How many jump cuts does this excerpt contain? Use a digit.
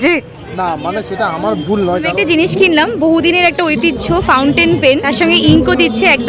2